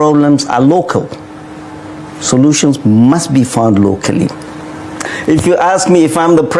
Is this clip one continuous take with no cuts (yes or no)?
no